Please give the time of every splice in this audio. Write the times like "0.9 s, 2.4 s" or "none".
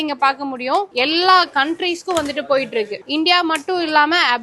0.9 s, 3.0 s